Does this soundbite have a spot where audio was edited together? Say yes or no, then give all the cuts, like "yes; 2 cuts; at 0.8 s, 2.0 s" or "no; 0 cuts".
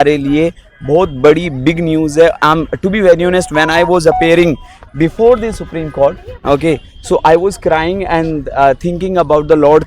no; 0 cuts